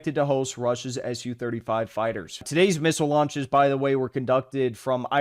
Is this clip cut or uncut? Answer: cut